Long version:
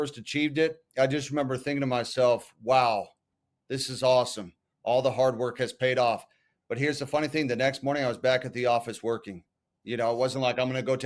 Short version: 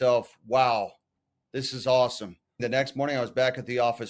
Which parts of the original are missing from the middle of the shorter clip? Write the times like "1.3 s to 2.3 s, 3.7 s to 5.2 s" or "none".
4.8 s to 7.5 s

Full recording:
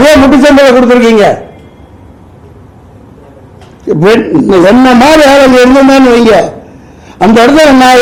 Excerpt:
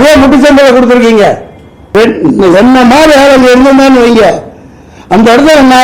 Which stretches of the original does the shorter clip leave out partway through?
1.9 s to 4.0 s

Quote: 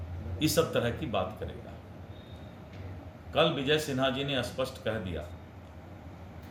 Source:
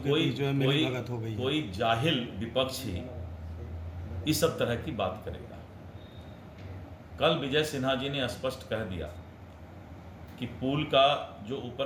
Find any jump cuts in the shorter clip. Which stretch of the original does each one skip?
none

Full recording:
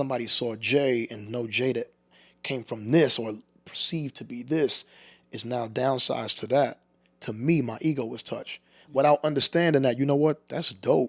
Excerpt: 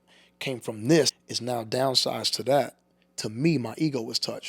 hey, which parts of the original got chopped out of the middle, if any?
3.2 s to 5.2 s

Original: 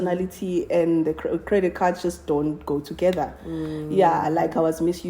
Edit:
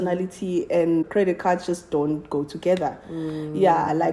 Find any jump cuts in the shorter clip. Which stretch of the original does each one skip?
1.1 s to 1.4 s

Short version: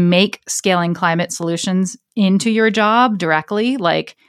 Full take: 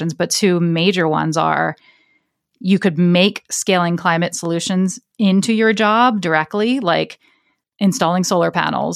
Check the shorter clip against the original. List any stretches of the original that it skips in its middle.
none

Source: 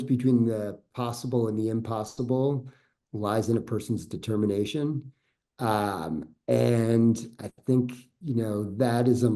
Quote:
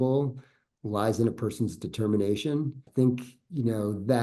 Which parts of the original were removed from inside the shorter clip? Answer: 5.1 s to 7.5 s

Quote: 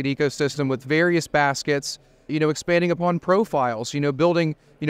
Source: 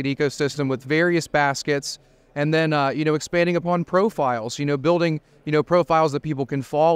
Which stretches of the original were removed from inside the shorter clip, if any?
2.3 s to 2.9 s

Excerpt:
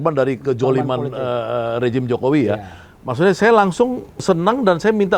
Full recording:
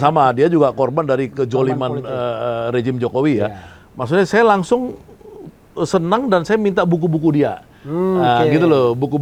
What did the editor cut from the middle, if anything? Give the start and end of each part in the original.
5.1 s to 5.8 s

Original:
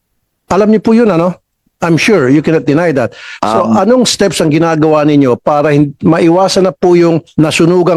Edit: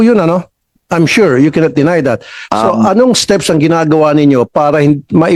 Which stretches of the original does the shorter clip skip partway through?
none

